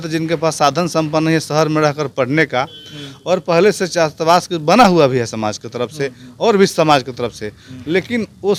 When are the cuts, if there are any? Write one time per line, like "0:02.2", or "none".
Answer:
none